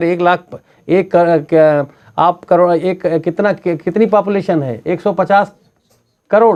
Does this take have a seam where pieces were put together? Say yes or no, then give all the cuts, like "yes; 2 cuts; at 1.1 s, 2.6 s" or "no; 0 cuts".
no; 0 cuts